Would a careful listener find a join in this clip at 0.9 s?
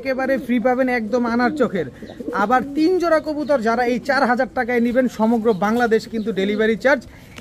no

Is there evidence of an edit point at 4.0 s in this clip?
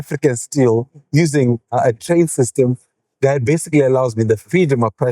no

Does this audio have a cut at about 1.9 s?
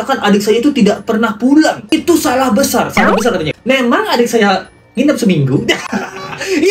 no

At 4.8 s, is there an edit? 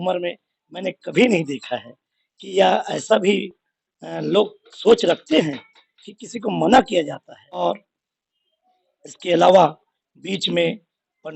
no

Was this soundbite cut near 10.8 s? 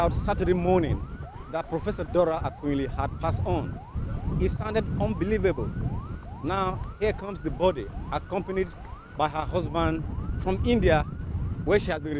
no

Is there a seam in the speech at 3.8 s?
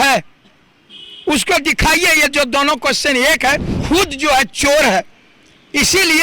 yes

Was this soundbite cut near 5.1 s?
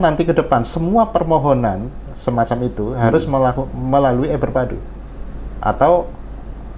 no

